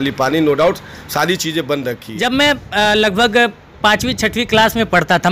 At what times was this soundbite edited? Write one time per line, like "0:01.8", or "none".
0:02.1